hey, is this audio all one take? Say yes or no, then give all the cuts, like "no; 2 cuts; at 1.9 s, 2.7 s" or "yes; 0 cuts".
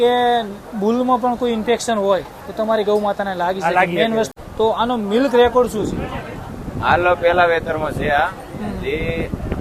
no; 1 cut; at 4.3 s